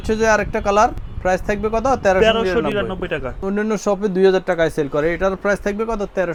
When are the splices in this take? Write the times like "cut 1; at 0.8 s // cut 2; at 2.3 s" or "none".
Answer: none